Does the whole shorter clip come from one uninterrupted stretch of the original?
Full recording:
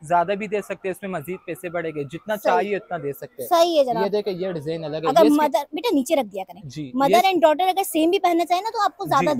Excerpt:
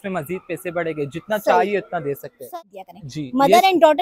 no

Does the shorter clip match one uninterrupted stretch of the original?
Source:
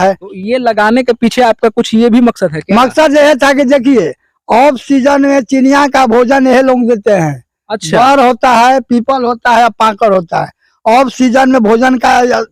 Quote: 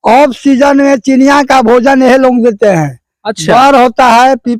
yes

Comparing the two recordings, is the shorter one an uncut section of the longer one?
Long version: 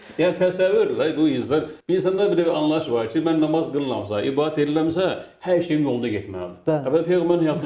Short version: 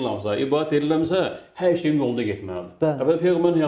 yes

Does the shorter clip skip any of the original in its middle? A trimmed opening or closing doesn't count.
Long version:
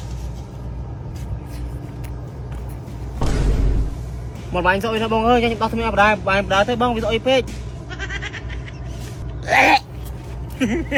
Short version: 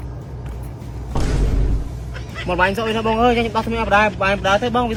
no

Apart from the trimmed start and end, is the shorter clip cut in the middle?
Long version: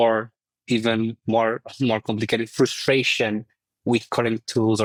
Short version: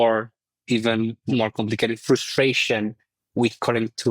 yes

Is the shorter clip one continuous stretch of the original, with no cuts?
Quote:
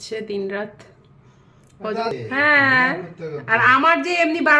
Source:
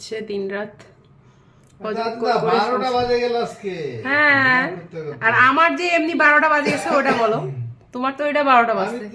no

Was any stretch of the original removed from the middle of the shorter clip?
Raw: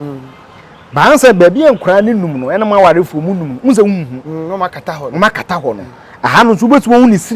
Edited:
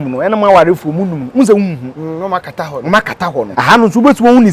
yes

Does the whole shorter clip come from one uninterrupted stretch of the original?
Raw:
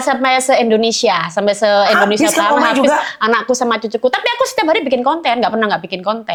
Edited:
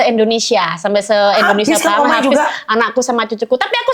yes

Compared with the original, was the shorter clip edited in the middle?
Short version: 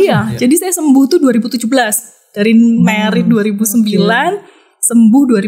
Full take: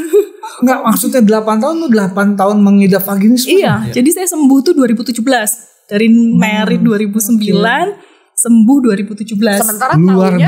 no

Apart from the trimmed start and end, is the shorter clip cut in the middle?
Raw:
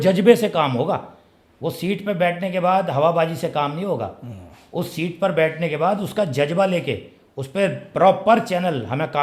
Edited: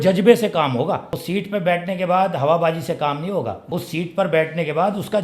yes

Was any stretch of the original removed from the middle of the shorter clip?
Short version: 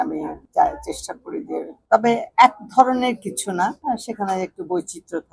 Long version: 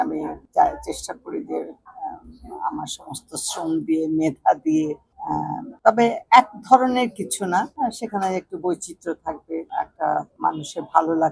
yes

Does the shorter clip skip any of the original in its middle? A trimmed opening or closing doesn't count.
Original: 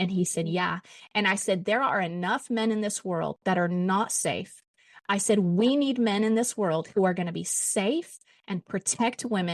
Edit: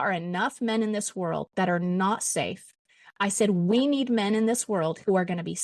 no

